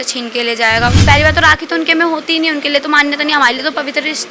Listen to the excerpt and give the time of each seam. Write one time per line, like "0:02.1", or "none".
0:01.0